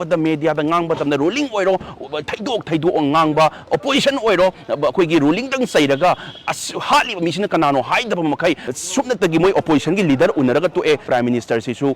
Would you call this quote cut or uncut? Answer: cut